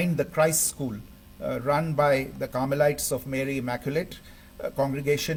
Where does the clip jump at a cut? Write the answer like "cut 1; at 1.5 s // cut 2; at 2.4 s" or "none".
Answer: none